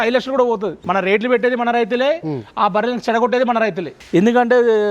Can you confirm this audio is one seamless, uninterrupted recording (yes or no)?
no